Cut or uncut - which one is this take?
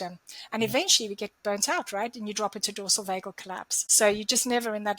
cut